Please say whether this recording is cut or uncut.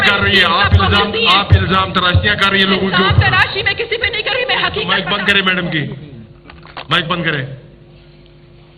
cut